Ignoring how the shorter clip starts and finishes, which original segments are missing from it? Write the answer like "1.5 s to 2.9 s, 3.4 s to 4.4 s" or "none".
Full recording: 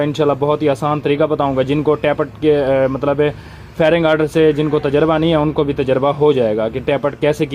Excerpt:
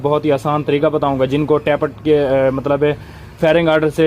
none